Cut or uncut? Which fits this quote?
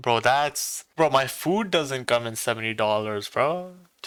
uncut